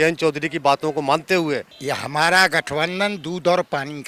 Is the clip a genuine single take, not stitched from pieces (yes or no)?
no